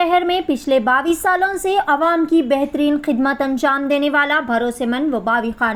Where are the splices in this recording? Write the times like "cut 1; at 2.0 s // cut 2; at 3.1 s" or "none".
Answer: none